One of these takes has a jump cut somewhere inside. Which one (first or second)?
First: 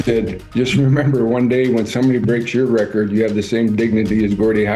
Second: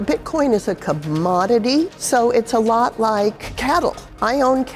second